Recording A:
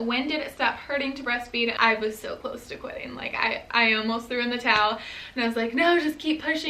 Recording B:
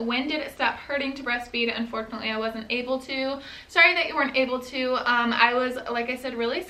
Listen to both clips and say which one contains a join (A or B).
A